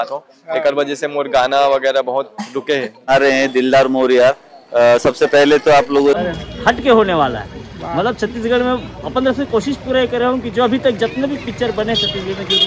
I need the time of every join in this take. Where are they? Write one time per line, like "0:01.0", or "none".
0:03.1
0:06.2